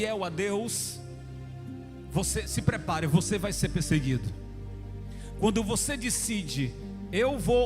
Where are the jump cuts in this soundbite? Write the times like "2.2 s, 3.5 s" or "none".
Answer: none